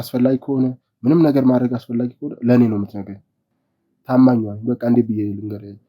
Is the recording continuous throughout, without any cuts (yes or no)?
yes